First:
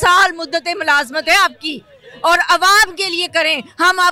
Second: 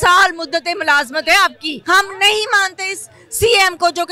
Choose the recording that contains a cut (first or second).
second